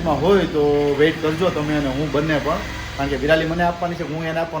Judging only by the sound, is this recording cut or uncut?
uncut